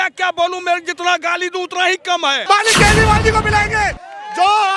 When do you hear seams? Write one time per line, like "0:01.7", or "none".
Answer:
0:02.4